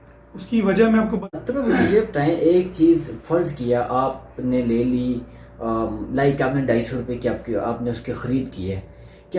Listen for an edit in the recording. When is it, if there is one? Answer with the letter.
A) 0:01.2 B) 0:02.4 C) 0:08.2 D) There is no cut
A